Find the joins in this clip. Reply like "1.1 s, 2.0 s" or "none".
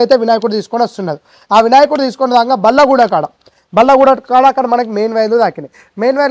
none